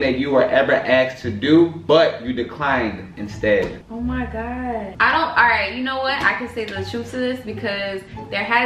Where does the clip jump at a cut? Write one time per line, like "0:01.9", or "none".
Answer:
none

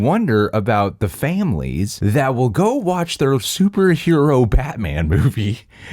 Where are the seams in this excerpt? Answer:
0:01.9

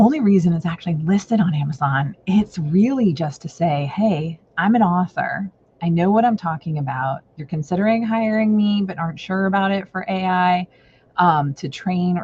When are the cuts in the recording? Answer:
none

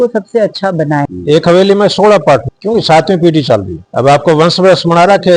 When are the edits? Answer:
0:01.1
0:02.5
0:03.8

